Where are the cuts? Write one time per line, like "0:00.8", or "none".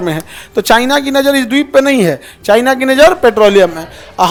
none